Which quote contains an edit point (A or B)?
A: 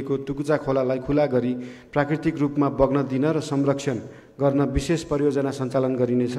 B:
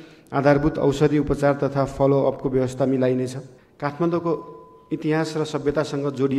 B